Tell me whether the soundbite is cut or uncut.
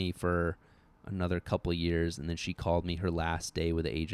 uncut